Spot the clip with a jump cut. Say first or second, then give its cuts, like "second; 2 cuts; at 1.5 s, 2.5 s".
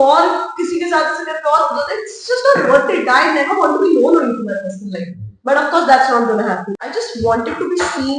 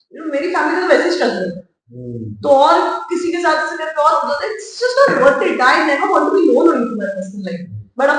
first; 1 cut; at 6.8 s